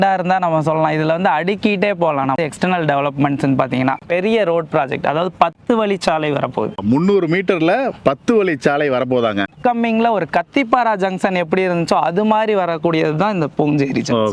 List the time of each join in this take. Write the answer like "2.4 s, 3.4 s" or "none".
4.0 s, 9.4 s